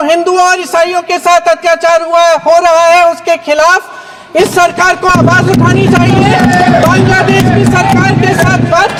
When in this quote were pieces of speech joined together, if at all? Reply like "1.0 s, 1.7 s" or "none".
none